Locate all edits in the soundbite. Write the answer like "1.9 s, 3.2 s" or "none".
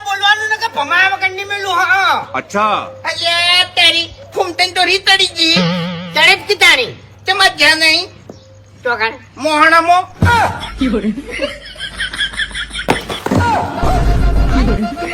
none